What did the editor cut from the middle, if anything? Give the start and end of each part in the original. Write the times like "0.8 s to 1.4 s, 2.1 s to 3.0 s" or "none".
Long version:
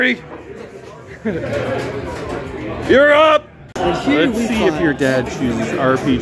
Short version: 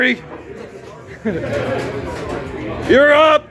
none